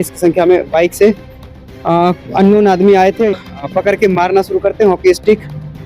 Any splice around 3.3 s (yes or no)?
yes